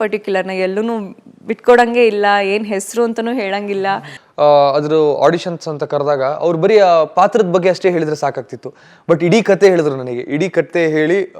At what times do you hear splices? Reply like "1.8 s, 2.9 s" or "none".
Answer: 4.2 s